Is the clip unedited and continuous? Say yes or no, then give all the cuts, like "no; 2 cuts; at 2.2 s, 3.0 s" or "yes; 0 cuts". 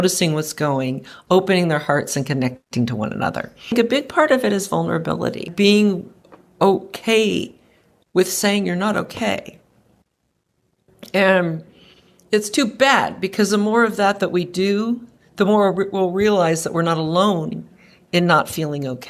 no; 2 cuts; at 3.7 s, 5.5 s